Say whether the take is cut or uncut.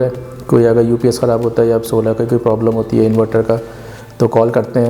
uncut